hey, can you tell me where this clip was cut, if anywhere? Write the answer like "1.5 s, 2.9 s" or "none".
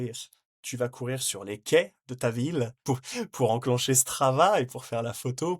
2.8 s